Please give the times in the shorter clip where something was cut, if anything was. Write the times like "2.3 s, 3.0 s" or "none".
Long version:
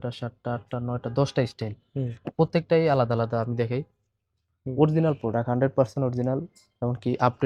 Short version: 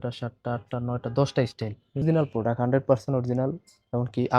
2.0 s